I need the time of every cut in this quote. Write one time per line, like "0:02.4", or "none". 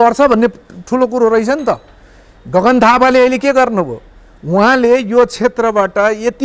none